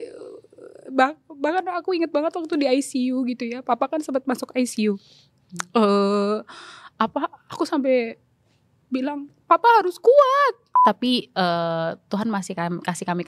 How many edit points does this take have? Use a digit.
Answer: 1